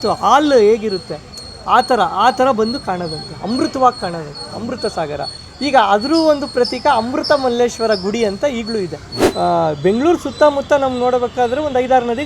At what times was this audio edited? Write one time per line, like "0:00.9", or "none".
0:09.2